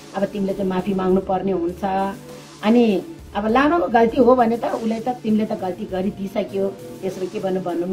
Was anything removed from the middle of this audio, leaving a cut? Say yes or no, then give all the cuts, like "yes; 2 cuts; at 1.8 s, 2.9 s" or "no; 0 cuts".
no; 0 cuts